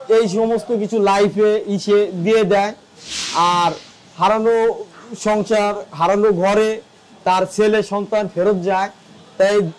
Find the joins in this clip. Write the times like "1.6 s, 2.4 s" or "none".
none

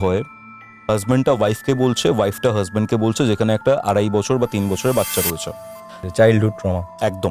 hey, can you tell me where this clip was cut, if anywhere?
6.0 s

